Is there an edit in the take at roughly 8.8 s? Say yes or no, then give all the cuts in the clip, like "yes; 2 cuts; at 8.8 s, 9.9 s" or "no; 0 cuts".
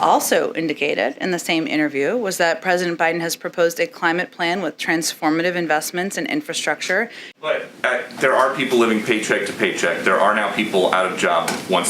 no; 1 cut; at 7.2 s